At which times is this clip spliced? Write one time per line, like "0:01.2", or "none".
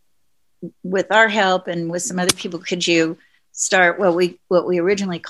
none

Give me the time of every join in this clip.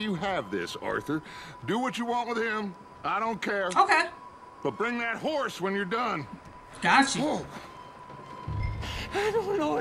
none

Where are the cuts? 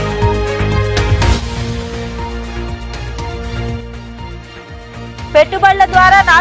0:01.1

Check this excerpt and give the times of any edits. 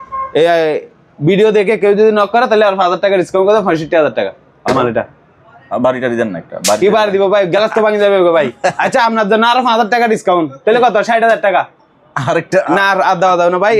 none

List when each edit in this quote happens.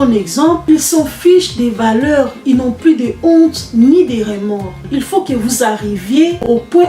0:04.8

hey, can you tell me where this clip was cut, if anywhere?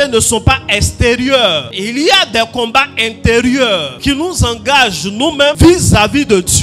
0:01.7
0:03.9
0:05.6

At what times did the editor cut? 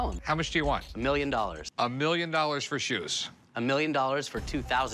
none

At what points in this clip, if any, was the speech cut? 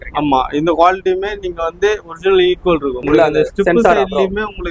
0:03.0

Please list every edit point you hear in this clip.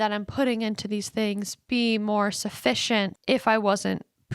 0:03.2

